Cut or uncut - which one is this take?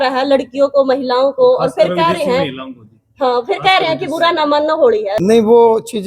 cut